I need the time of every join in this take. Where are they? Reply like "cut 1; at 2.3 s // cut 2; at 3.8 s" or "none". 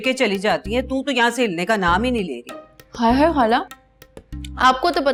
none